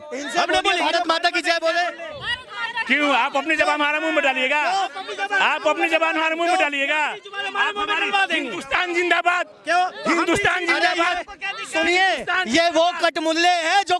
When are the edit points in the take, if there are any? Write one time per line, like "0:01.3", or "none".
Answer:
none